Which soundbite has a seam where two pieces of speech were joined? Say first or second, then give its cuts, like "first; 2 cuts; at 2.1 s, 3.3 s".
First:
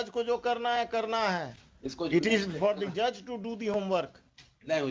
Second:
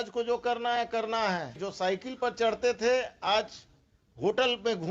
second; 1 cut; at 1.7 s